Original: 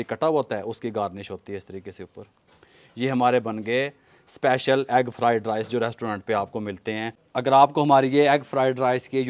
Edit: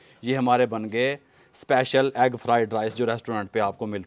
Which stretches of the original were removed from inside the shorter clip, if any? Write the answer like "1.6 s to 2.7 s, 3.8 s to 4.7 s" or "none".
none

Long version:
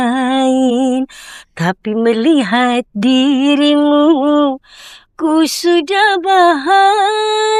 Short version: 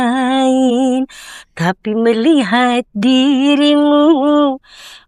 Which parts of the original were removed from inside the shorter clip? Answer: none

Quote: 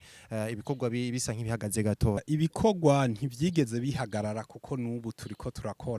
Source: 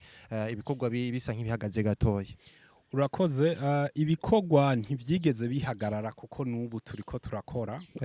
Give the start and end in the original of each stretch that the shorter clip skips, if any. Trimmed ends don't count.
2.2 s to 3.9 s

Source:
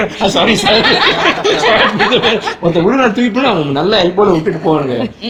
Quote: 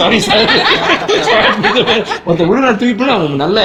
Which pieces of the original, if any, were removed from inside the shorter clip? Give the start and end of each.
none

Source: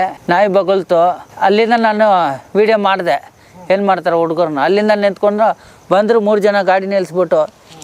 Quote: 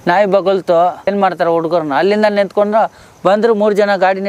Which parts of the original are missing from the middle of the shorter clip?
1.3 s to 3.7 s

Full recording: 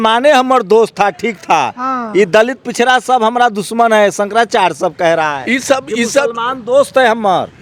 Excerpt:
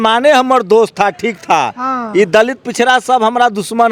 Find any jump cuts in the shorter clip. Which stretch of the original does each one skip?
none

